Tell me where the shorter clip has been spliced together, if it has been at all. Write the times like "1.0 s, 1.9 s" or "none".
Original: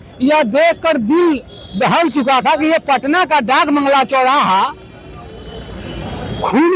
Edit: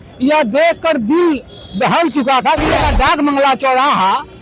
2.8 s